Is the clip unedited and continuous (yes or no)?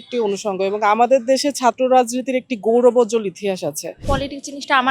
no